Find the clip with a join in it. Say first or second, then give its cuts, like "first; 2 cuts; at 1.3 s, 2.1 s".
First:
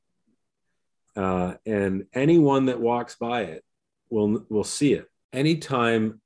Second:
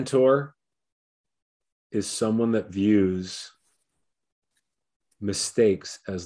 first; 1 cut; at 5.2 s